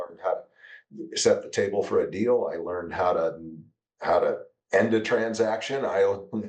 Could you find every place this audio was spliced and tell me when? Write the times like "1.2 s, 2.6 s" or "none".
none